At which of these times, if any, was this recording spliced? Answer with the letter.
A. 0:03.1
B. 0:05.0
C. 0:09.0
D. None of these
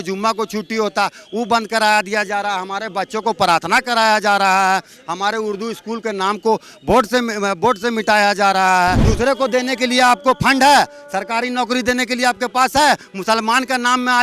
C